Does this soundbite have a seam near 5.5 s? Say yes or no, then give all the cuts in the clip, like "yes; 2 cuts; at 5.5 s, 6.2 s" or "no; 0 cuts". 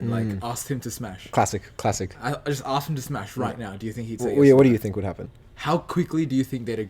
yes; 1 cut; at 5.5 s